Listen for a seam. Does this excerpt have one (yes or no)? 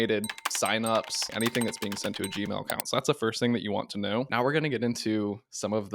yes